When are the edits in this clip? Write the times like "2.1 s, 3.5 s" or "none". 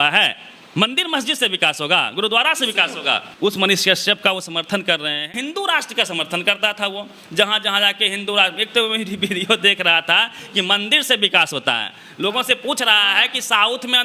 3.3 s, 5.3 s